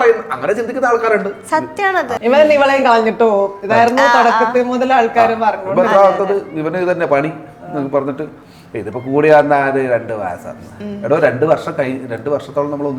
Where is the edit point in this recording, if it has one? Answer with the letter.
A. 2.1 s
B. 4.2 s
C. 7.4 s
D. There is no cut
A